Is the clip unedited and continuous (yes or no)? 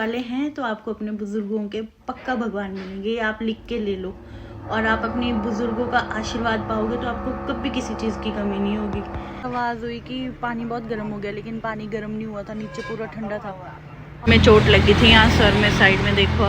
no